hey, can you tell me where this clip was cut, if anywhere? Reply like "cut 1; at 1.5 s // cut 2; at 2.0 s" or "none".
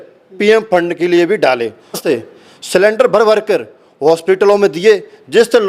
cut 1; at 2.0 s